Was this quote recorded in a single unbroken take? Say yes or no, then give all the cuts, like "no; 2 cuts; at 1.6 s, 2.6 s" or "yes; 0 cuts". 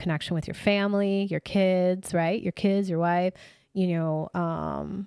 yes; 0 cuts